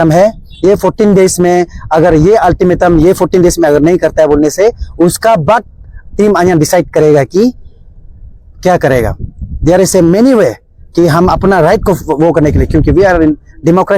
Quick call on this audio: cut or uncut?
uncut